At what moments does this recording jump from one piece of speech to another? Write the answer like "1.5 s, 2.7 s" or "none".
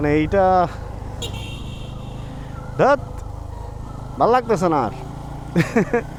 none